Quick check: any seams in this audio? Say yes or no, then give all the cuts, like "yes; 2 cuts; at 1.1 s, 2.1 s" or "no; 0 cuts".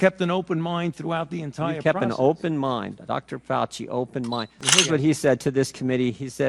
yes; 1 cut; at 4.5 s